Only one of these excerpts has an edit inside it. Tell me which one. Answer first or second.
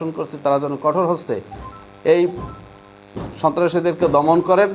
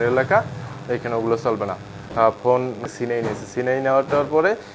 second